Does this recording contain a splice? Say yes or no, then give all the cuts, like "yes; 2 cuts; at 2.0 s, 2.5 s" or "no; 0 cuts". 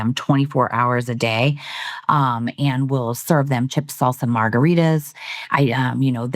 no; 0 cuts